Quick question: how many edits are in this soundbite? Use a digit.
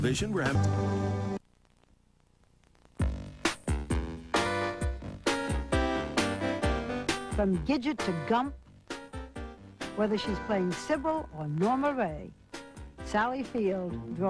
1